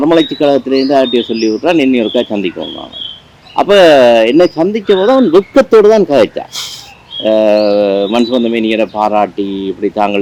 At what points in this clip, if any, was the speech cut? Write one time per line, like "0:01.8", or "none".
none